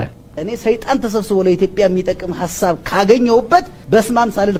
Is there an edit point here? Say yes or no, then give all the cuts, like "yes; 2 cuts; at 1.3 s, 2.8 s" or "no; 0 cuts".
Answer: no; 0 cuts